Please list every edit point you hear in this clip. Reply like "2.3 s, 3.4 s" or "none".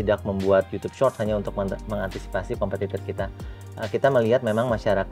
none